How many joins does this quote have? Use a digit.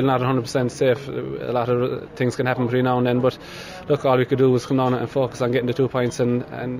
0